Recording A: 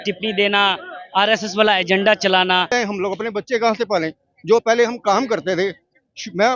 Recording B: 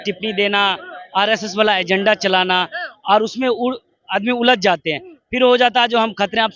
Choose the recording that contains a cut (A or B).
A